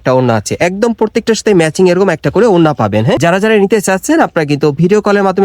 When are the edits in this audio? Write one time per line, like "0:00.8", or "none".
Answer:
0:03.2